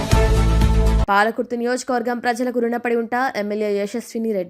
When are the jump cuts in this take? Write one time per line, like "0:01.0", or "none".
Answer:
none